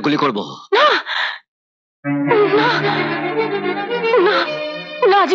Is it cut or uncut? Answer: uncut